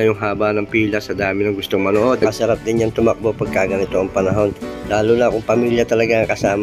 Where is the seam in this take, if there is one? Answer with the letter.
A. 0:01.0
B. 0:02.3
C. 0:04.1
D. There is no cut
B